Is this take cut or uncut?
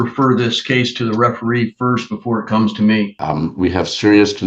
cut